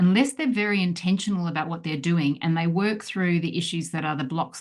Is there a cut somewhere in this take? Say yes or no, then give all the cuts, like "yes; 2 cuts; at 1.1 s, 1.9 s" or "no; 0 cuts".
no; 0 cuts